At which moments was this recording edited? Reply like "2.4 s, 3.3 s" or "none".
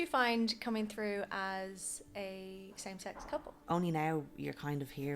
3.6 s